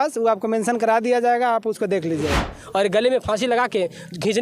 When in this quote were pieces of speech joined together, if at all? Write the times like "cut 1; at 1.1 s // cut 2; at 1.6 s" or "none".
cut 1; at 2.5 s